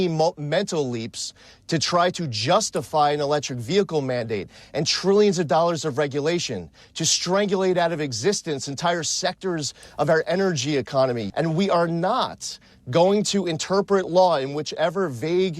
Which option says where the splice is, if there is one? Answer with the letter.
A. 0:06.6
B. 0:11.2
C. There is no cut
B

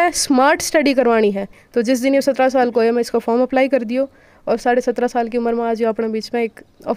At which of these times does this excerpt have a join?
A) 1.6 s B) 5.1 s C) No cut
A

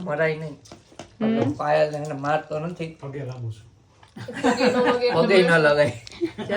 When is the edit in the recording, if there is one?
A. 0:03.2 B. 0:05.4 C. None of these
C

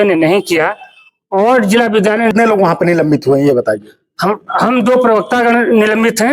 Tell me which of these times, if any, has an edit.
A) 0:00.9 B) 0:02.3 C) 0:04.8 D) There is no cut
B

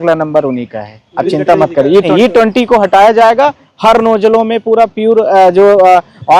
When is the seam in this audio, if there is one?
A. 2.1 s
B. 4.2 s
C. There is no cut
A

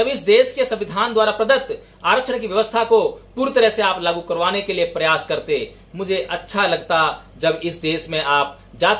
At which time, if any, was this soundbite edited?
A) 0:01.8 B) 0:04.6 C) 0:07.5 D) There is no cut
D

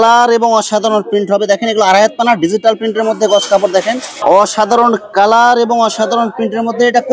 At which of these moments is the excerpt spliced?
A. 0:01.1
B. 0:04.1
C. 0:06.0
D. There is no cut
B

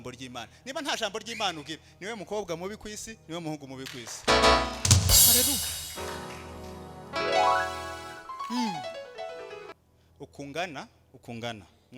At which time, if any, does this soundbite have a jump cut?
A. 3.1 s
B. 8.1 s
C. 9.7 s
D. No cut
C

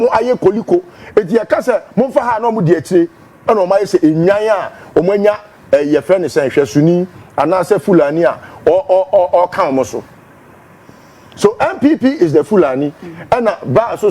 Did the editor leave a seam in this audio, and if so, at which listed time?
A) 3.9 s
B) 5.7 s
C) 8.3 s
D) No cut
A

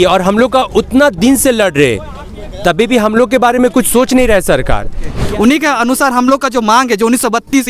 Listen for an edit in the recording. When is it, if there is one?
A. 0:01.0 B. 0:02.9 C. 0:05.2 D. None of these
C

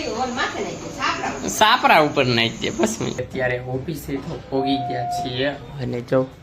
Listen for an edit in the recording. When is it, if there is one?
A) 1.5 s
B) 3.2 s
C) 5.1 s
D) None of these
B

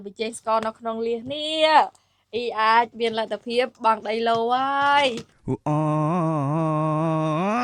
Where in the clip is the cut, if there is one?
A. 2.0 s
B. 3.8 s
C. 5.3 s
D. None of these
C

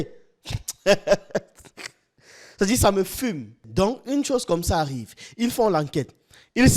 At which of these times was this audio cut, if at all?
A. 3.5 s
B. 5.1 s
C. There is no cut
A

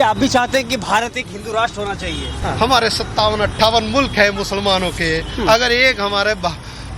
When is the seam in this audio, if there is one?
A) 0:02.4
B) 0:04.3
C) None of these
A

